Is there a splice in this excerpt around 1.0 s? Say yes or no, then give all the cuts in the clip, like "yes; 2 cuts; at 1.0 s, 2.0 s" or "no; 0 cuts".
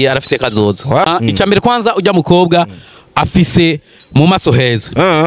yes; 1 cut; at 1.0 s